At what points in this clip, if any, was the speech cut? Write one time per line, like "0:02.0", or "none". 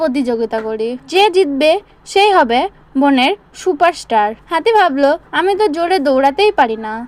0:01.0
0:04.4
0:05.3